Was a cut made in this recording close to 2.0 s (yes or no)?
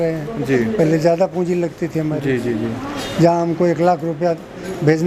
no